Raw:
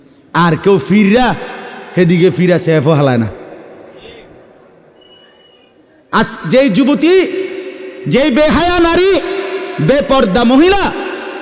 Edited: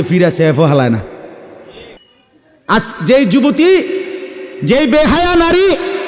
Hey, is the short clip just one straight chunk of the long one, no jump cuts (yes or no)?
no